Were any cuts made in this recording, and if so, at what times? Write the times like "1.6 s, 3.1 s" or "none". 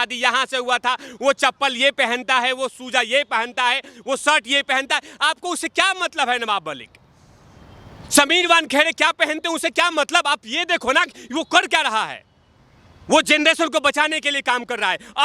none